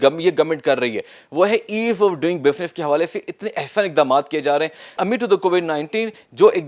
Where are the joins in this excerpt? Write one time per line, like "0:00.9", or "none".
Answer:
0:04.9